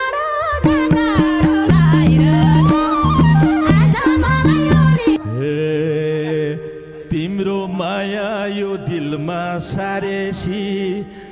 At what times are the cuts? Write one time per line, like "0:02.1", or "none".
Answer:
0:05.2